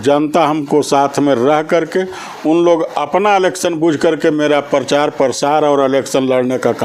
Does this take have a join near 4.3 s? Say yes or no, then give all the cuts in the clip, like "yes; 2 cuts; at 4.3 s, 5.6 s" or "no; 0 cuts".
no; 0 cuts